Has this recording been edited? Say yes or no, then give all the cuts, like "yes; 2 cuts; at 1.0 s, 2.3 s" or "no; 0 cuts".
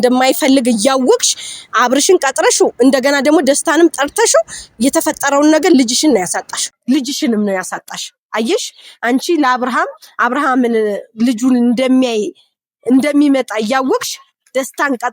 yes; 1 cut; at 6.5 s